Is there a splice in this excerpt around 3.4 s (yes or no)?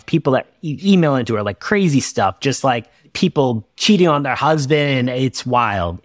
yes